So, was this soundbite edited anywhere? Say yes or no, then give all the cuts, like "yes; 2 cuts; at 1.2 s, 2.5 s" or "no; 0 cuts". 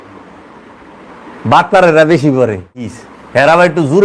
yes; 1 cut; at 2.9 s